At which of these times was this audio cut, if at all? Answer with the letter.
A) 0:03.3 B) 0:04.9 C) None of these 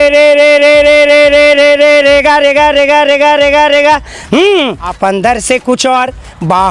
B